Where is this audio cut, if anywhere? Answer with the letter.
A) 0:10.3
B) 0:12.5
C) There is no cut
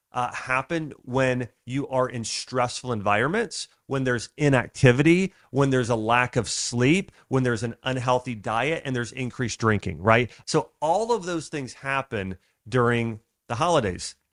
C